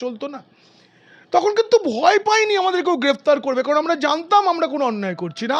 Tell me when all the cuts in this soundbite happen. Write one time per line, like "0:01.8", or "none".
none